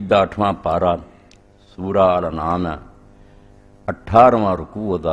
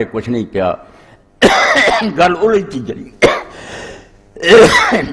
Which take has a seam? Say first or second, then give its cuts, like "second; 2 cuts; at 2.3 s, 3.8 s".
second; 1 cut; at 2.3 s